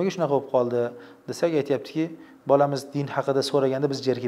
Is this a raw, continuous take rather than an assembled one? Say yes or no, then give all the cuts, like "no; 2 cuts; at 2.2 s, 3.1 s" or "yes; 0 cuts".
yes; 0 cuts